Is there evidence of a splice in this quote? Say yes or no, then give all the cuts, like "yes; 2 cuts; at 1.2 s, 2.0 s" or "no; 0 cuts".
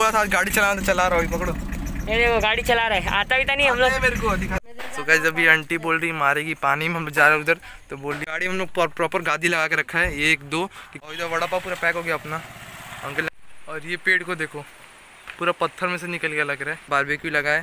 yes; 5 cuts; at 4.6 s, 8.2 s, 10.9 s, 13.3 s, 16.9 s